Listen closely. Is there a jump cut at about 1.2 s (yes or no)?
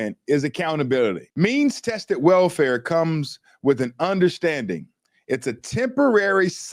yes